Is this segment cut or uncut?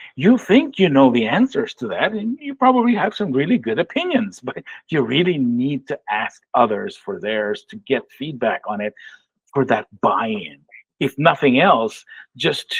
uncut